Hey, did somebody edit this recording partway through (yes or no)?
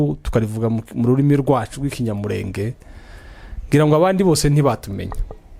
no